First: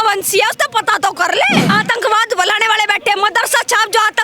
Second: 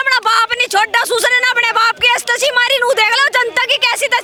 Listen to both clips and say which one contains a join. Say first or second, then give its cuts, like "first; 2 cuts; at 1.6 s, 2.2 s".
first; 1 cut; at 1.7 s